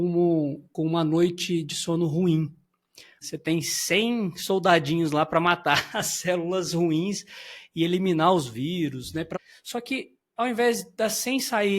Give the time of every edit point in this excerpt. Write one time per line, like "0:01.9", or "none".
0:03.2
0:09.3